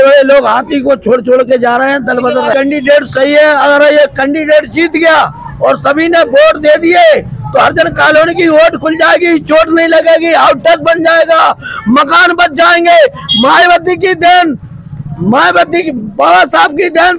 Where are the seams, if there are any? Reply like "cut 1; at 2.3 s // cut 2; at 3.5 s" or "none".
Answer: cut 1; at 2.5 s